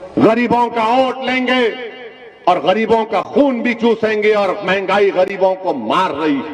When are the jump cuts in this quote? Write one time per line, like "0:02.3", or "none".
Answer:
none